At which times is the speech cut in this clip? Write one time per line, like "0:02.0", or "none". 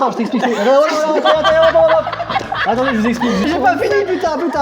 0:03.5